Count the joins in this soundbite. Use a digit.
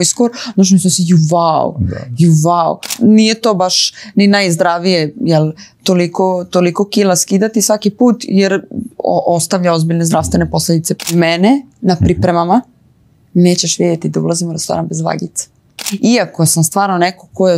3